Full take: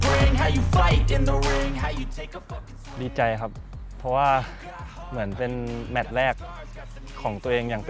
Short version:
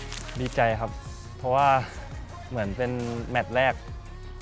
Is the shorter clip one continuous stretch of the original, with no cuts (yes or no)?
yes